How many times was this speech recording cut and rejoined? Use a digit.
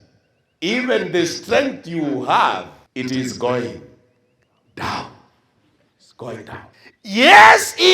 2